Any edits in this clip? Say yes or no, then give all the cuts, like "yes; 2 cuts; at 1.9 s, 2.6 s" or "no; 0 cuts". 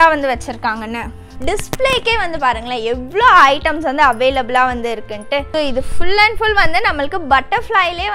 yes; 2 cuts; at 1.3 s, 5.5 s